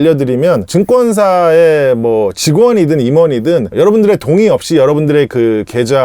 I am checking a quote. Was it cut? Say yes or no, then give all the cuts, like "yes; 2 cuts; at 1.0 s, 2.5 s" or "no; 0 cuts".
no; 0 cuts